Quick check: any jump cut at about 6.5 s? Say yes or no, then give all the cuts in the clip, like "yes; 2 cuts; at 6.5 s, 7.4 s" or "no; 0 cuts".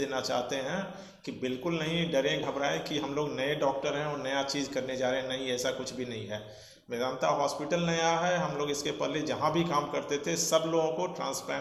no; 0 cuts